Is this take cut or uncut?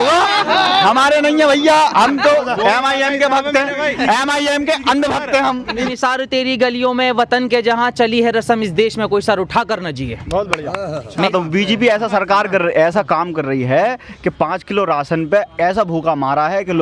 cut